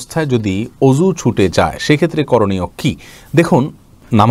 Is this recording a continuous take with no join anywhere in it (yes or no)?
yes